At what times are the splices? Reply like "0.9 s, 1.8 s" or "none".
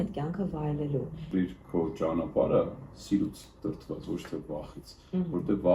1.3 s